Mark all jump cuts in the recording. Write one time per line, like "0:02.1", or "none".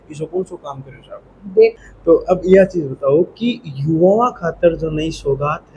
0:01.8